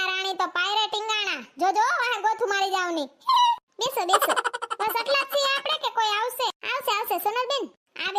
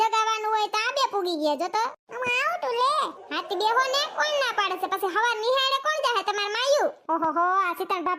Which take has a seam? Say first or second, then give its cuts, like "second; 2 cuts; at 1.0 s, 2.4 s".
second; 1 cut; at 7.0 s